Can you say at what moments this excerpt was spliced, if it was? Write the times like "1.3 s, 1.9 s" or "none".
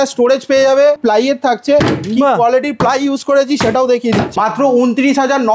1.0 s, 4.3 s